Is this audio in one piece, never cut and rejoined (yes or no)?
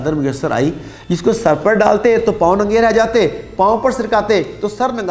yes